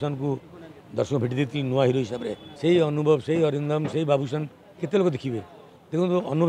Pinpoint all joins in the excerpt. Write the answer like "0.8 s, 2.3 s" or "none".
2.4 s